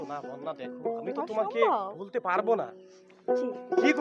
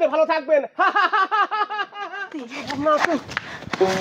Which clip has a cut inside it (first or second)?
second